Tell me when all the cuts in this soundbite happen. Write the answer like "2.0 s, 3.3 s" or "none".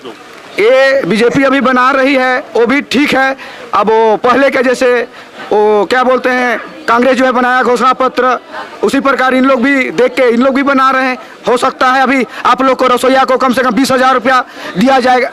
none